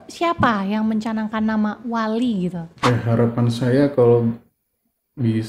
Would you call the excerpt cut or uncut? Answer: cut